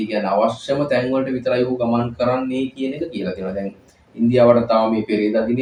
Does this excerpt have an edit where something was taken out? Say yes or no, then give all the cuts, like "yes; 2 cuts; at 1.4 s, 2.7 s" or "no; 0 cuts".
no; 0 cuts